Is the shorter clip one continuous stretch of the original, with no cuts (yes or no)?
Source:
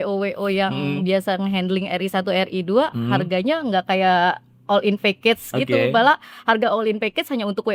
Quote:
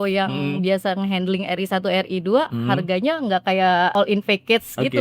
no